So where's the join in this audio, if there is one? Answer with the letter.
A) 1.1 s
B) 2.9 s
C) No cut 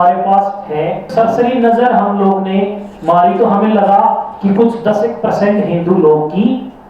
A